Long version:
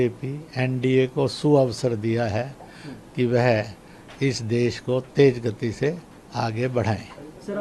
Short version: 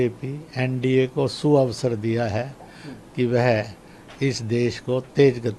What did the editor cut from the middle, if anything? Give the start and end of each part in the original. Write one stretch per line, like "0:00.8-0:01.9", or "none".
none